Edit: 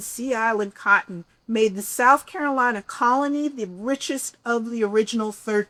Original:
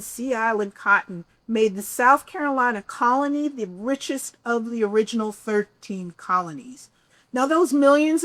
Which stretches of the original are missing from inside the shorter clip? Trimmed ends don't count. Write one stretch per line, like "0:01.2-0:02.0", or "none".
none